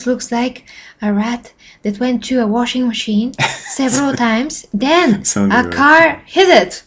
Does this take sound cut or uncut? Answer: uncut